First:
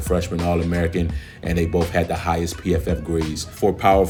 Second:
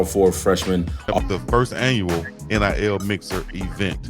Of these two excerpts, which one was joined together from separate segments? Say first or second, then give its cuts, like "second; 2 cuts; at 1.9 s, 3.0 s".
second; 1 cut; at 1.1 s